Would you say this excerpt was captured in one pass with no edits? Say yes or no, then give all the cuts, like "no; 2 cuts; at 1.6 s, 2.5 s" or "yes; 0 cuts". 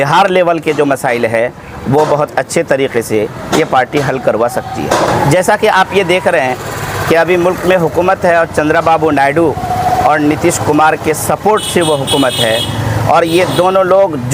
yes; 0 cuts